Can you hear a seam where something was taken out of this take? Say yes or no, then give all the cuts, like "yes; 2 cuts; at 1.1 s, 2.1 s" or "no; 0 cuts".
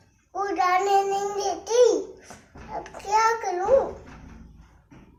no; 0 cuts